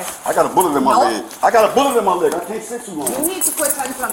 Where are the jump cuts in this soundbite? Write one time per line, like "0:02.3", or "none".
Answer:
none